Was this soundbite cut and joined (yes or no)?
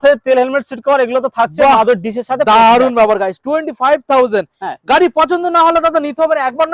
no